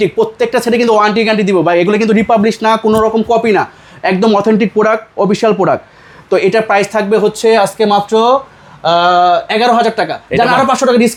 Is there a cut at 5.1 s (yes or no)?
no